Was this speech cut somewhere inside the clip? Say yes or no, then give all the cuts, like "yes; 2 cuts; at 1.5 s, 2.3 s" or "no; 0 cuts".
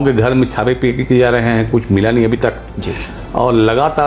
no; 0 cuts